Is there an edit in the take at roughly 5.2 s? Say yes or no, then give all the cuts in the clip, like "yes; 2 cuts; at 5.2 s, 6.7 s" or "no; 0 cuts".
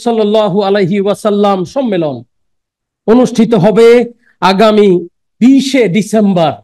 no; 0 cuts